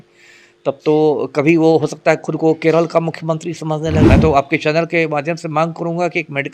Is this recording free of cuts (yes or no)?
no